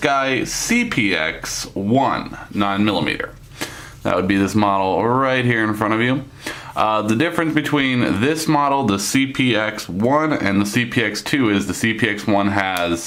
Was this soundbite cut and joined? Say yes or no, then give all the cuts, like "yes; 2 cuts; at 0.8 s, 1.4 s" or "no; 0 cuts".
no; 0 cuts